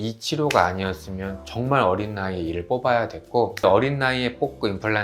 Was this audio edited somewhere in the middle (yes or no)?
no